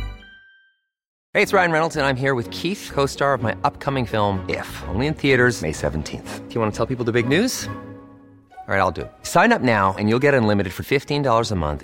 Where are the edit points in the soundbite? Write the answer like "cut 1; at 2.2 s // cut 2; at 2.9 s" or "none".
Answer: cut 1; at 1.2 s